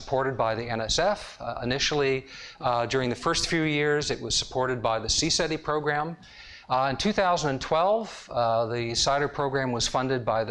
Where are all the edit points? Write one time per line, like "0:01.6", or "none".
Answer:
0:04.3